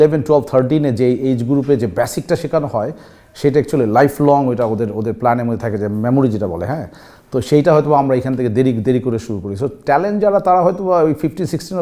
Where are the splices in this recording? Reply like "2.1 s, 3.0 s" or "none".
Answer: none